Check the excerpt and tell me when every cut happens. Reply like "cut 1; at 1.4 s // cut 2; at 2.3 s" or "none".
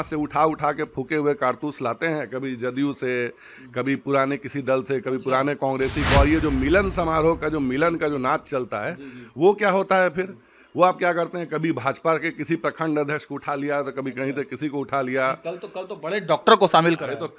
none